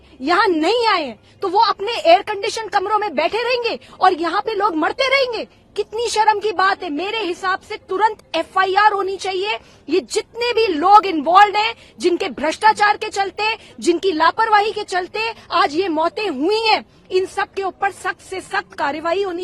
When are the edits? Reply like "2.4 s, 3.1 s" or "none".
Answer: none

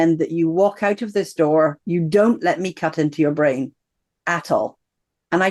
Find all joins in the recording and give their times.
none

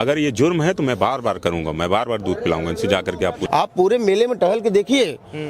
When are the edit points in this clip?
3.4 s

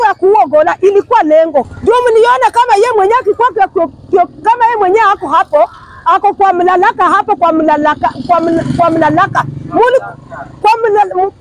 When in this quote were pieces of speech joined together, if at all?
1.7 s

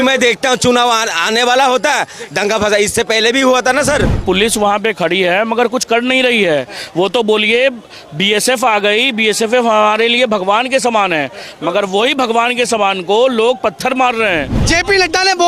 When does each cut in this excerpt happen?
4.2 s, 14.6 s

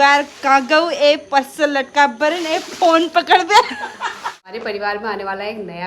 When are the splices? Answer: 4.4 s

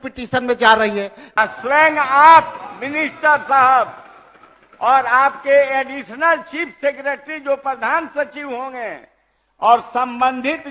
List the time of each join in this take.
1.2 s

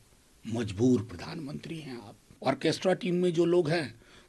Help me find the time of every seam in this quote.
2.3 s

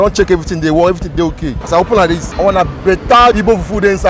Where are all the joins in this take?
1.5 s, 2.3 s

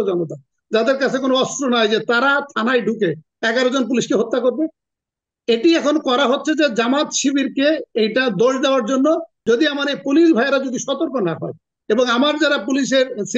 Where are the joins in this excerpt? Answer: 9.3 s

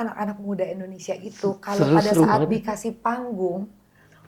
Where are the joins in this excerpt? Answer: none

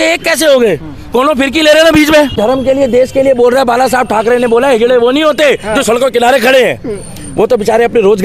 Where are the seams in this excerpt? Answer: 2.4 s

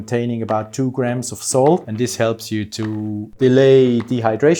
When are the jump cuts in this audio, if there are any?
1.9 s, 3.3 s

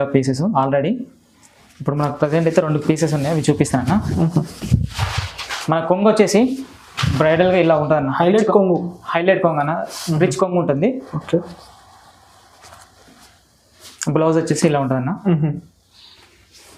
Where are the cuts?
none

